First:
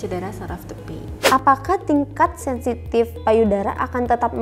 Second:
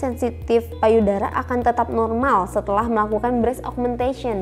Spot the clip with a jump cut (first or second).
first